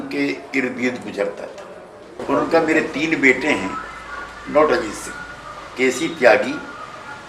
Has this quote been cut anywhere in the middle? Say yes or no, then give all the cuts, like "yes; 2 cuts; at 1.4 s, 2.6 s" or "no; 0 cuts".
yes; 1 cut; at 2.2 s